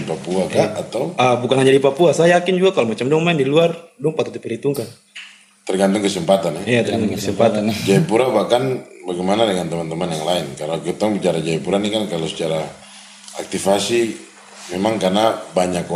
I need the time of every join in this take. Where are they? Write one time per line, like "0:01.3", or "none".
none